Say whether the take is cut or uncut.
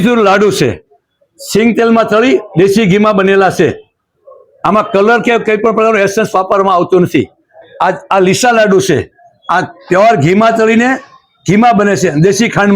uncut